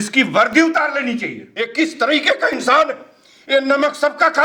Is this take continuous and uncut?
no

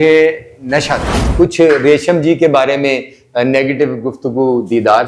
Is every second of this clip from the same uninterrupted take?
no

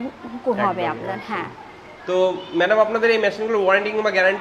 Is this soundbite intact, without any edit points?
yes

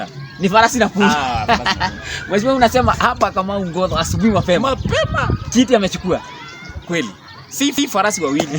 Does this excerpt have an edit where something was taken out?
no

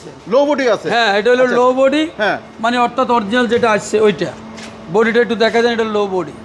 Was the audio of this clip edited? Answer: no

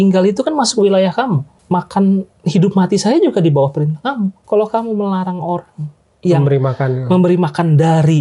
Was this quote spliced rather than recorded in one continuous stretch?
yes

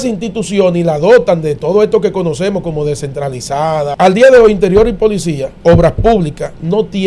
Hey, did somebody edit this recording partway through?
yes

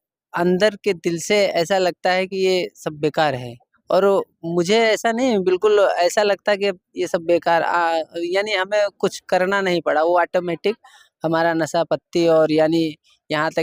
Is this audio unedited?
yes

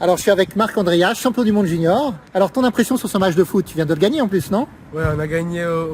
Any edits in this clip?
no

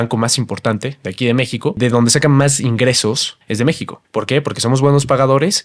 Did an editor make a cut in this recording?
yes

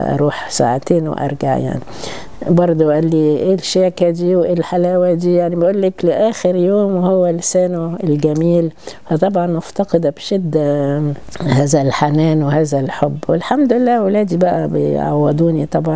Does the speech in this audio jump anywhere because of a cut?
no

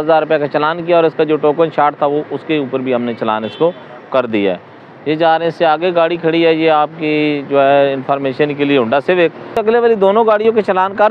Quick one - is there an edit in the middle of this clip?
no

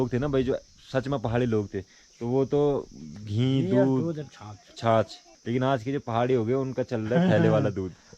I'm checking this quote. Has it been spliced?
yes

